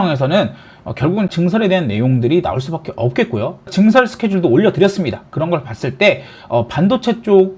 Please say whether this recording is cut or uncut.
cut